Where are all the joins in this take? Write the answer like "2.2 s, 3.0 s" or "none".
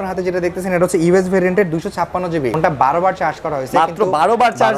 2.6 s